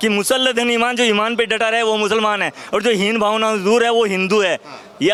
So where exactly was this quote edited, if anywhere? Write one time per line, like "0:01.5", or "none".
none